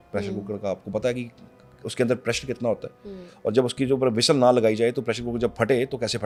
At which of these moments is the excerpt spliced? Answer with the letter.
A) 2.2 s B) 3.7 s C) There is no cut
C